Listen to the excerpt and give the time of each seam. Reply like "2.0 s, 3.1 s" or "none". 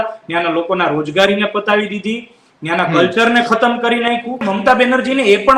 4.4 s